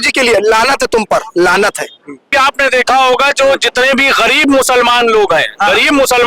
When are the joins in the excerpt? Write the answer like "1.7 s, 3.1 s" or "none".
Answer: 2.3 s